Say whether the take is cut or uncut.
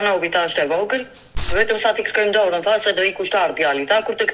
cut